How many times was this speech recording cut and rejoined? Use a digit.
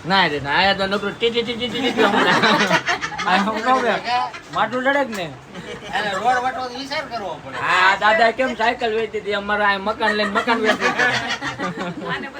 0